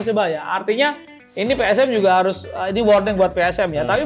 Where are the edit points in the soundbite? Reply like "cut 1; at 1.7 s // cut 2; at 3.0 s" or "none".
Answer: none